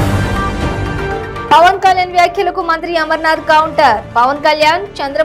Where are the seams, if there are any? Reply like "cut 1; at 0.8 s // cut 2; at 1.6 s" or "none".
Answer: none

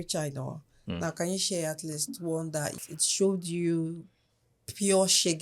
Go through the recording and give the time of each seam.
cut 1; at 2.8 s

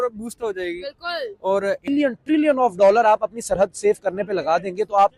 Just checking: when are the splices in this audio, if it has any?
cut 1; at 1.9 s

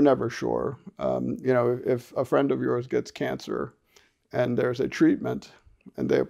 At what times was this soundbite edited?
none

